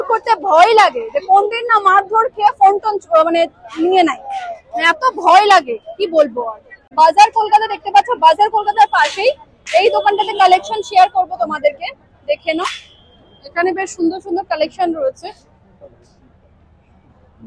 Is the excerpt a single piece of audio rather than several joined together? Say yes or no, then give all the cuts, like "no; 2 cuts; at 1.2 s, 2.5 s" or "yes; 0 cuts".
yes; 0 cuts